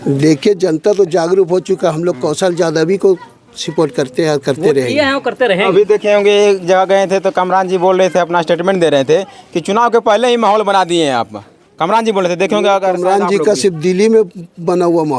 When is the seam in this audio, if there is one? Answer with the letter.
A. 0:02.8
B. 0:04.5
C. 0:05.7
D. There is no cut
C